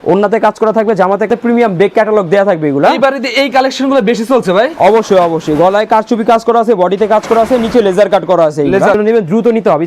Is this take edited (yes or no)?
yes